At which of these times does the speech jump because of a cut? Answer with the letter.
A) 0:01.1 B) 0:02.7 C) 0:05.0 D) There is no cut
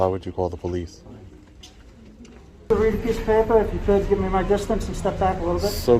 B